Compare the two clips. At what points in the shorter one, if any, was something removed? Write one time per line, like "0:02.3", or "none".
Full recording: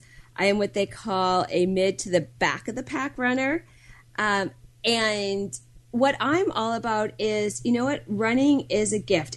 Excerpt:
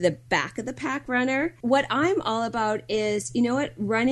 0:01.6

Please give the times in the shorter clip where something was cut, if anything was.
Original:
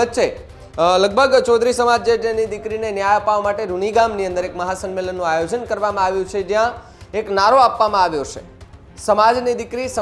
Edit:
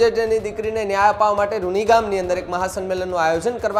none

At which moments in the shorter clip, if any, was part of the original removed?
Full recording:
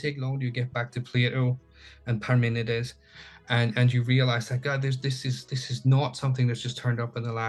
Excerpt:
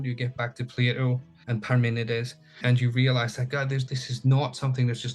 0:01.3
0:02.6
0:03.9

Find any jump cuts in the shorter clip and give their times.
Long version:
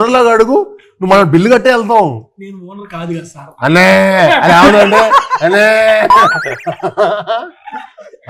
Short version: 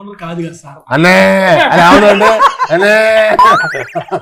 none

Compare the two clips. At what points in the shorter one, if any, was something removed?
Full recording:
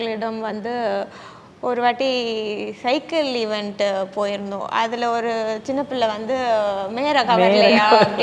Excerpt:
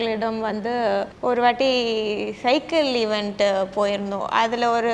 0:01.1

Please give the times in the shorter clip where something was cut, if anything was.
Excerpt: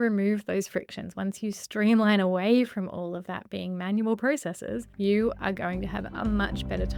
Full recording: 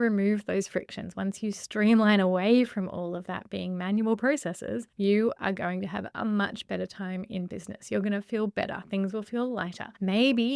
none

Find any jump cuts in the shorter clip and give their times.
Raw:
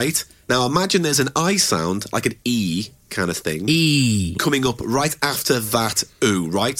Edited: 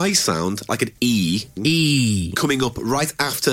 0:01.5

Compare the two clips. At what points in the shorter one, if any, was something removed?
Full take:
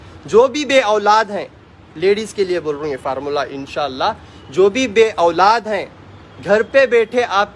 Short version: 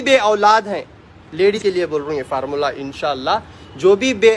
0:01.6

